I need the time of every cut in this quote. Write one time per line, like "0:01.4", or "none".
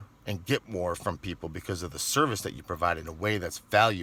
none